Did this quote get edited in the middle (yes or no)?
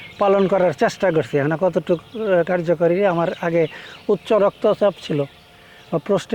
no